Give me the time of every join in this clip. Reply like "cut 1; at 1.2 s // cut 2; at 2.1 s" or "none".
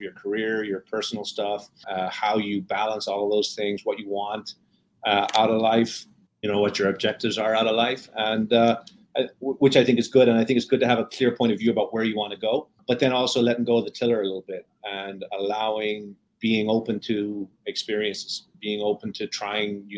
cut 1; at 18.5 s